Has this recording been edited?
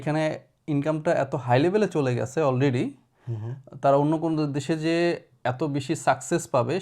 no; 0 cuts

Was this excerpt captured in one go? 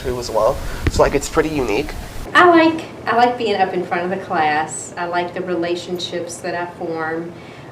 no; 1 cut; at 2.2 s

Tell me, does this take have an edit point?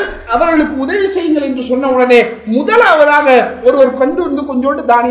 no; 0 cuts

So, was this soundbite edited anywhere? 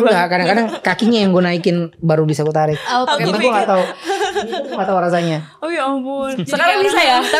no; 0 cuts

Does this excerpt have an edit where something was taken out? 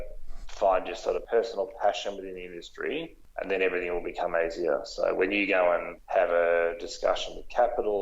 yes; 3 cuts; at 1.2 s, 3.2 s, 6.0 s

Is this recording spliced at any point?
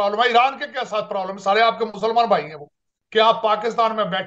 yes; 1 cut; at 2.9 s

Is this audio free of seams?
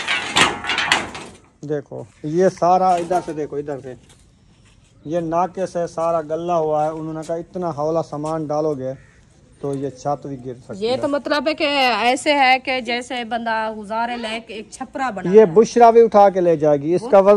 yes; 0 cuts

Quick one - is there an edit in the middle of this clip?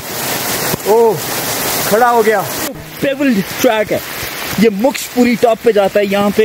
yes; 1 cut; at 2.9 s

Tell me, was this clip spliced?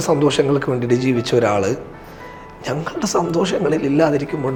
no; 0 cuts

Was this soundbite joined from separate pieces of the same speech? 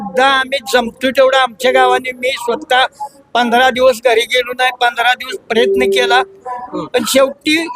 no; 0 cuts

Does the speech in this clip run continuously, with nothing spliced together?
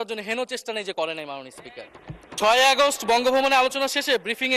no; 1 cut; at 2.3 s

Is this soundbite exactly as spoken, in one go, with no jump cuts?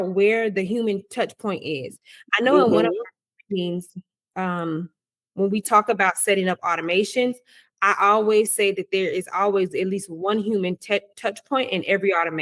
yes; 0 cuts

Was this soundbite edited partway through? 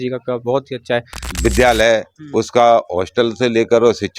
yes; 1 cut; at 1.2 s

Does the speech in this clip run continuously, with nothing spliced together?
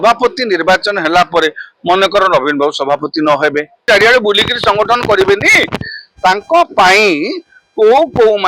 no; 1 cut; at 3.8 s

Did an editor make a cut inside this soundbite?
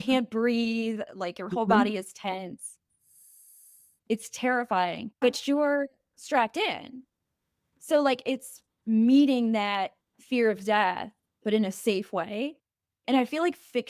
yes; 1 cut; at 5.2 s

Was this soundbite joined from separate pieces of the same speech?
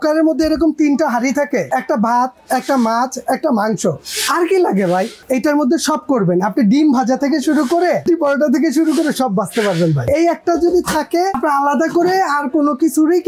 yes; 5 cuts; at 1.7 s, 5.2 s, 8.0 s, 10.1 s, 11.4 s

